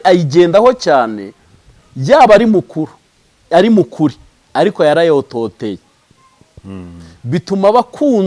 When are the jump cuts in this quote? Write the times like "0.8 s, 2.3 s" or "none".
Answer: none